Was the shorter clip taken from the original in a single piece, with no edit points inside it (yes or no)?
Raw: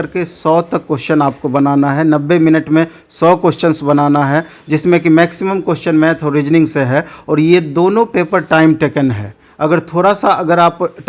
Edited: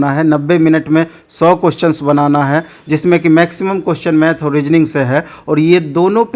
yes